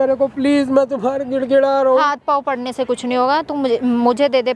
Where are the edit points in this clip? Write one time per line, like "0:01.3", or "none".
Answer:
none